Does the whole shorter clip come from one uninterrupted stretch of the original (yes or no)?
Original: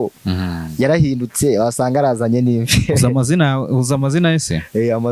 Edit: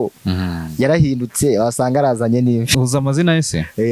no